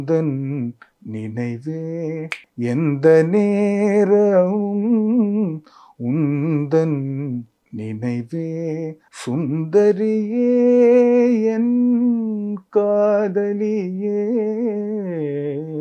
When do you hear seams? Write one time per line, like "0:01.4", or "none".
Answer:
0:02.4
0:09.1